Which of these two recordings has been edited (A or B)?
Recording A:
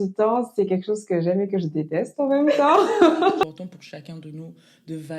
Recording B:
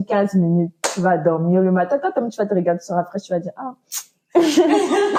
A